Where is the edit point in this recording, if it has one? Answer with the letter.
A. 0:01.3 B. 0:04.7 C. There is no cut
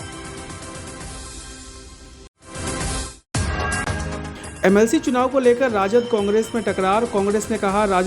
A